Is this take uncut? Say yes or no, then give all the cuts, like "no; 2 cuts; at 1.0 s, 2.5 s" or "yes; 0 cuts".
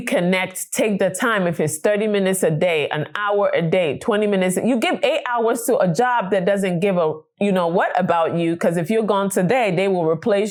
yes; 0 cuts